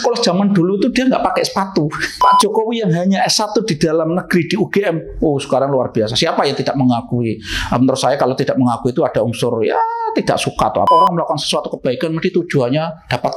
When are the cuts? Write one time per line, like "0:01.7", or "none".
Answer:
0:02.1
0:10.9